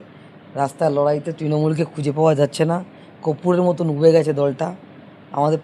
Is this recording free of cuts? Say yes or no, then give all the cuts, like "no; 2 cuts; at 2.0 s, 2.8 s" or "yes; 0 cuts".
yes; 0 cuts